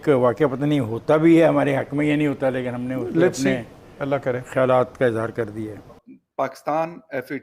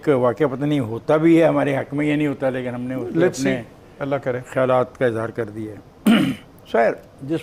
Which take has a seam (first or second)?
first